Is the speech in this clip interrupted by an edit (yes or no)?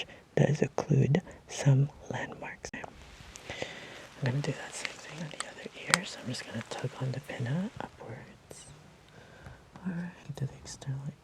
yes